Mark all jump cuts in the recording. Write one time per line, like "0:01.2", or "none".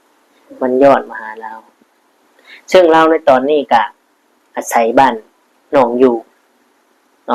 none